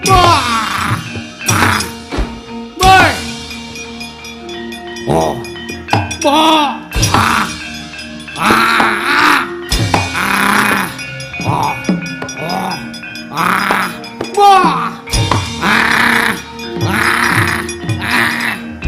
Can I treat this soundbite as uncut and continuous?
yes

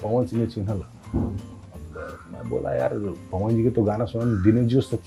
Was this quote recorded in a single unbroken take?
yes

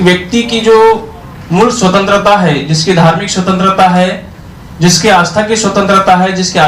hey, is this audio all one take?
yes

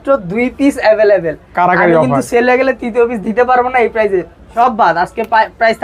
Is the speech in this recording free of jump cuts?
no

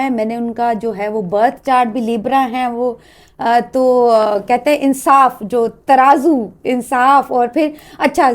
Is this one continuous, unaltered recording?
yes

